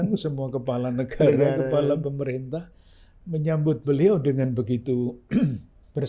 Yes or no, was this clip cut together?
no